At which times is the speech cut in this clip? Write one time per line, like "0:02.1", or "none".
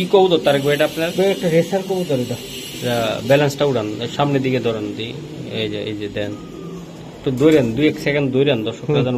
none